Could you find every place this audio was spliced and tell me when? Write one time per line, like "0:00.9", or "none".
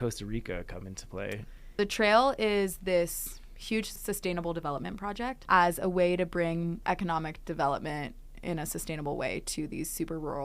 0:01.7
0:04.0
0:05.4
0:06.8